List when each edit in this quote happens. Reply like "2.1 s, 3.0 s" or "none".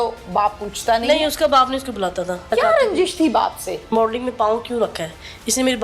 2.5 s, 3.9 s